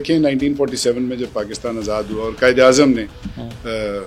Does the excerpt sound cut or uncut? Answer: uncut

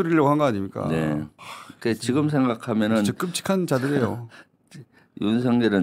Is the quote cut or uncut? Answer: uncut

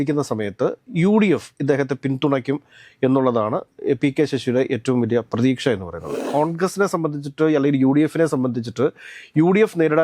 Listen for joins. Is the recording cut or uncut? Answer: cut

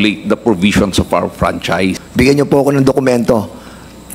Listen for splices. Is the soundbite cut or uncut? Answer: cut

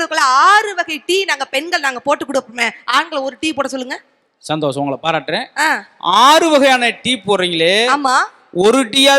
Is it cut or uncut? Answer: uncut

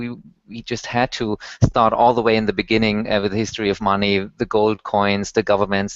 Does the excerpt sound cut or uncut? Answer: cut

